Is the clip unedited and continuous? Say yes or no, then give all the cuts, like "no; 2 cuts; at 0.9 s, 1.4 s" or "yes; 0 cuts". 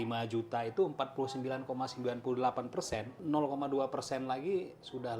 no; 1 cut; at 3.1 s